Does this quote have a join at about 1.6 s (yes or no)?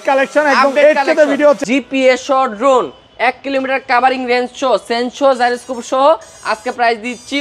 yes